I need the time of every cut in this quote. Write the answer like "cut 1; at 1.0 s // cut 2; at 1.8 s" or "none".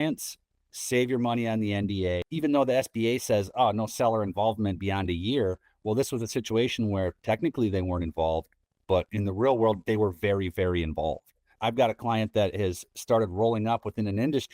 cut 1; at 2.3 s // cut 2; at 11.4 s